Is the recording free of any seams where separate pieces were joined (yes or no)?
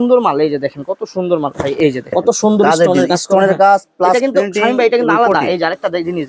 no